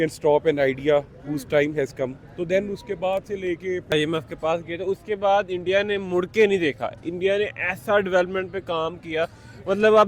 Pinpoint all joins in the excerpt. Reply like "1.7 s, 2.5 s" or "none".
3.9 s